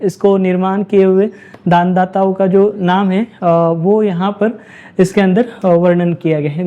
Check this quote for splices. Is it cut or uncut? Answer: uncut